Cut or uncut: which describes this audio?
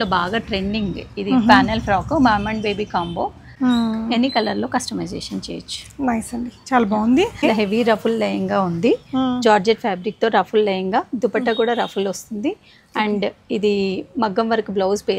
cut